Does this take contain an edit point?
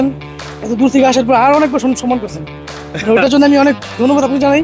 no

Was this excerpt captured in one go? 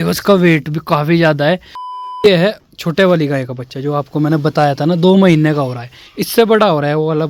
no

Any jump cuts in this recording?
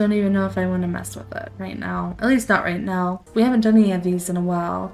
yes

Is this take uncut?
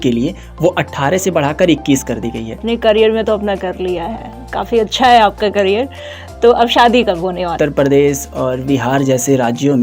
no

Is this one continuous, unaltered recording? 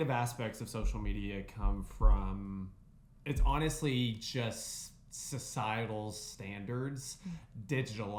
yes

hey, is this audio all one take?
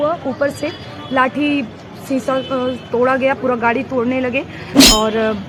yes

